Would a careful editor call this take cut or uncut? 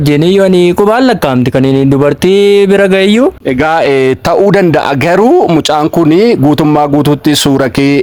uncut